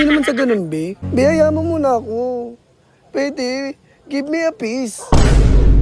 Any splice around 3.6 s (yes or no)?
no